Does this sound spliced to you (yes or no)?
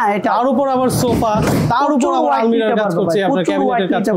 no